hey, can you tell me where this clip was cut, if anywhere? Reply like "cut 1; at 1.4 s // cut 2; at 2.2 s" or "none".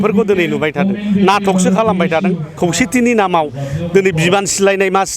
cut 1; at 2.5 s

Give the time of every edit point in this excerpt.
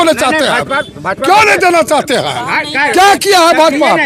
none

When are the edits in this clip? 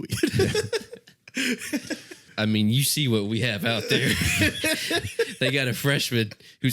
cut 1; at 2.2 s

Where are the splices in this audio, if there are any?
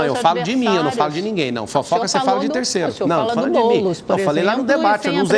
none

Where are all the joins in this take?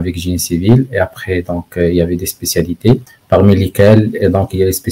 cut 1; at 3.1 s

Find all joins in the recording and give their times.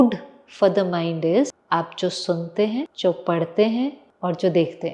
cut 1; at 1.6 s // cut 2; at 2.9 s // cut 3; at 4.1 s

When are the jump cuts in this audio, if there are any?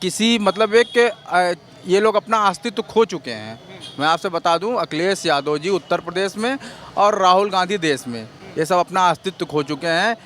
none

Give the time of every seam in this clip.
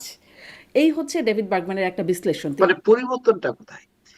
cut 1; at 2.5 s

